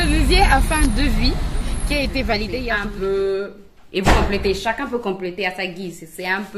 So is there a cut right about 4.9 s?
no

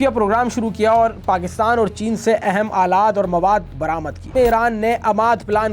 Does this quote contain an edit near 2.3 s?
no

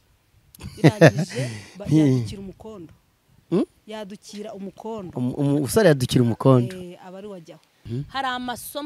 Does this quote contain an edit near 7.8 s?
yes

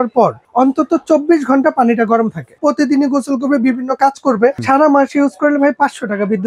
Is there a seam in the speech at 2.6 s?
yes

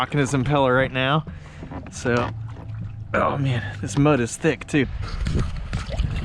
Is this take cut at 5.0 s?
yes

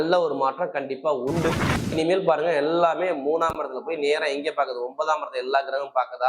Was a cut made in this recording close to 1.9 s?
yes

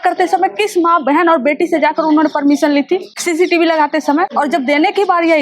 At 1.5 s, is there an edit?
no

